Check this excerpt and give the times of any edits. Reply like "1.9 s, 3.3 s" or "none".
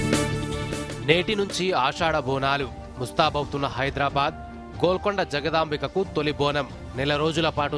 none